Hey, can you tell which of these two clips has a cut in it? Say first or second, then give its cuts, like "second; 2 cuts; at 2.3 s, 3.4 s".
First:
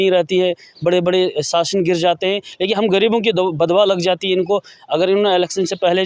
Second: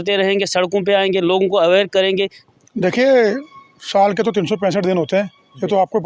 second; 1 cut; at 2.4 s